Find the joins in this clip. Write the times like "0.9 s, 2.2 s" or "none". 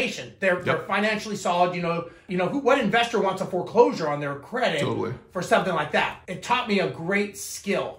2.2 s, 6.2 s

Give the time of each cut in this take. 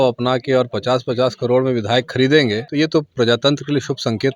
2.6 s

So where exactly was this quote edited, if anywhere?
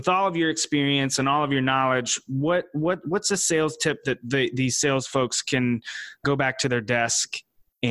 6.2 s

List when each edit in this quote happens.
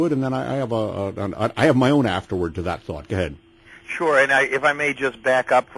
none

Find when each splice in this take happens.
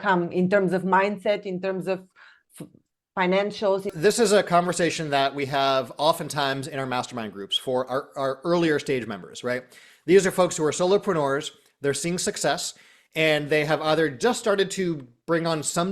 3.9 s

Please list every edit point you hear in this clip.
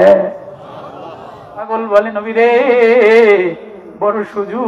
1.8 s

